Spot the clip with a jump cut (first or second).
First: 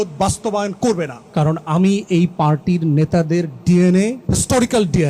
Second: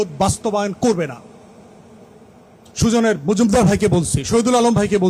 first